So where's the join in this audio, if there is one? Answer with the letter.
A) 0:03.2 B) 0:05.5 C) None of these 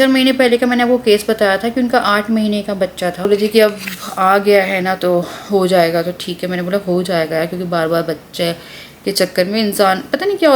A